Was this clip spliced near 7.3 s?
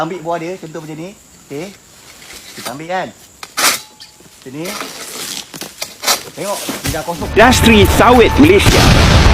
yes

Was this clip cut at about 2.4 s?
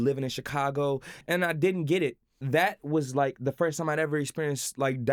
yes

